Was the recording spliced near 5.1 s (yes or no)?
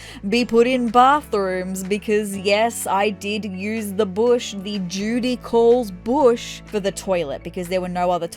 no